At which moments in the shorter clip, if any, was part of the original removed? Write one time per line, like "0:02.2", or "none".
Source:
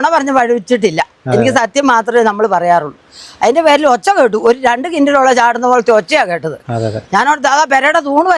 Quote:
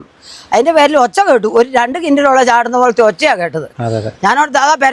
none